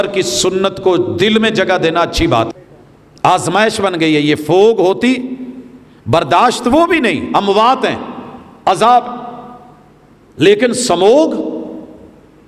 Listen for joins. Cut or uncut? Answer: cut